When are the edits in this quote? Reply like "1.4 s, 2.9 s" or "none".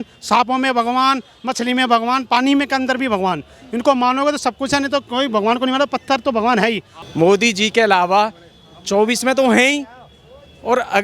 6.9 s